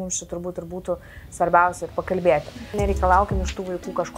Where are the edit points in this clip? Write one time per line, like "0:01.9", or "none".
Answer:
0:02.7